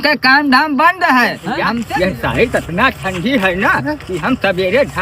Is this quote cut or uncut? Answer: cut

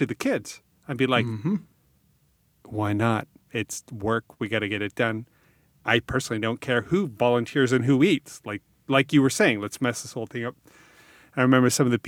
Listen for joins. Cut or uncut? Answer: uncut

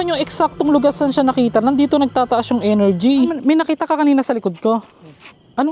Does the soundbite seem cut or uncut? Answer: cut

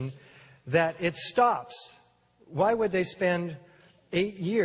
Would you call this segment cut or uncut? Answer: uncut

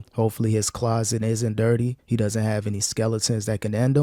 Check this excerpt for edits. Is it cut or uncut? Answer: cut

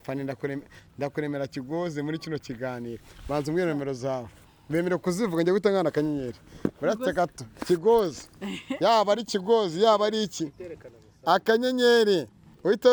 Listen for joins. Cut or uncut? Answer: uncut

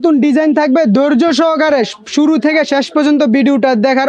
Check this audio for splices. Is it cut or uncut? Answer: uncut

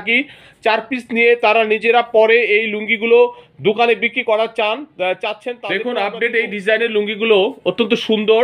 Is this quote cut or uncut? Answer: cut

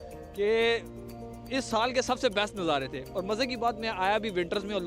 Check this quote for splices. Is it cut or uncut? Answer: uncut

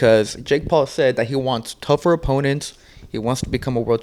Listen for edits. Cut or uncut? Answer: uncut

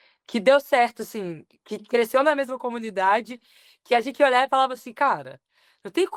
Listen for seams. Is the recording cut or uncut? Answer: uncut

